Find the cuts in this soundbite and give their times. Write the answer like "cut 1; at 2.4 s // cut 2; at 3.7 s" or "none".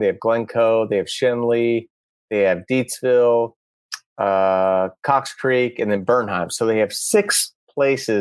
none